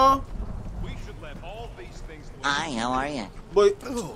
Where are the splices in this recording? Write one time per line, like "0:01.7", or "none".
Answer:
none